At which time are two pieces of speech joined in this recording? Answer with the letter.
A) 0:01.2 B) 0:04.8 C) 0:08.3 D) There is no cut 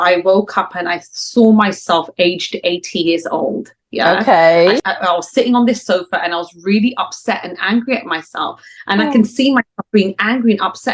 B